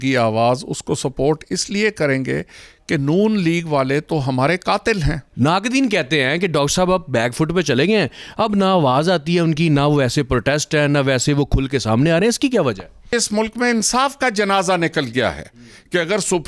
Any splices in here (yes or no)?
yes